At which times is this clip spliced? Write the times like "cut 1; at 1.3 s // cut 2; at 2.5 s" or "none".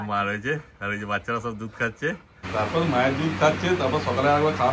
cut 1; at 2.3 s